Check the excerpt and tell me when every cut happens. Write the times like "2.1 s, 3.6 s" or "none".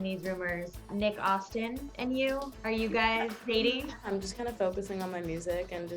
0.9 s, 1.9 s, 2.5 s, 3.4 s, 4.1 s